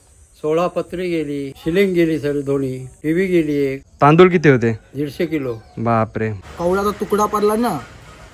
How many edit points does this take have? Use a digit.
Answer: 4